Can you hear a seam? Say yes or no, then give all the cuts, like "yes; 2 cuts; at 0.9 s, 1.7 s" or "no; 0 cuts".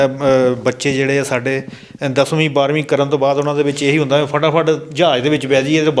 no; 0 cuts